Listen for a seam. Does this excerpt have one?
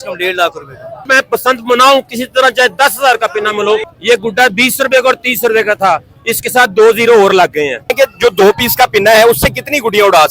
yes; 3 cuts; at 1.1 s, 3.9 s, 7.9 s

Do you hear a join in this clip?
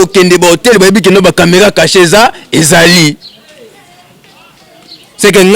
no; 0 cuts

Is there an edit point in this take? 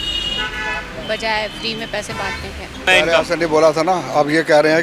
yes; 1 cut; at 2.9 s

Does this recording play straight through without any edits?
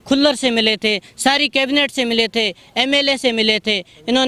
yes; 0 cuts

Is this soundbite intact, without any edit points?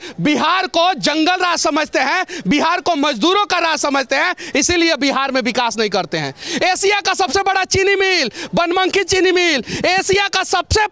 yes; 0 cuts

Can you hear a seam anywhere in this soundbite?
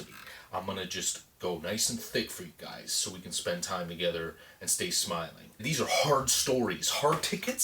yes; 1 cut; at 5.6 s

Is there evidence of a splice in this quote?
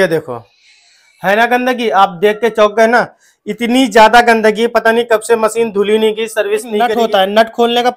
yes; 1 cut; at 6.9 s

